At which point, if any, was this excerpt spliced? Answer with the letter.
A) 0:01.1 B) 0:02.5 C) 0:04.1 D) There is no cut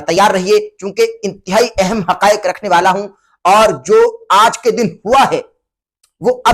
D